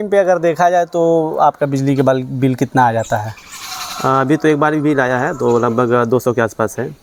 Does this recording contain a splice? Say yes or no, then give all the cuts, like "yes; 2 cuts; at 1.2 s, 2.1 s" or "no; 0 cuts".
no; 0 cuts